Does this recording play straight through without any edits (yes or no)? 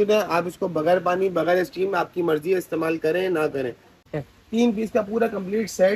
no